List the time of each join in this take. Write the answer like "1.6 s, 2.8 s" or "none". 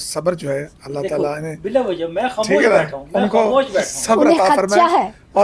none